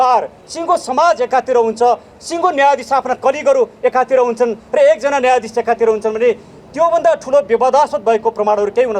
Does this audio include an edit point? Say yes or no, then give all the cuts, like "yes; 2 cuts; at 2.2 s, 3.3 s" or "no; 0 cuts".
no; 0 cuts